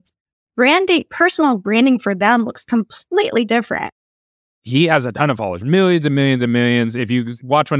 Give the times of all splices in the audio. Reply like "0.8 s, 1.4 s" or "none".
4.6 s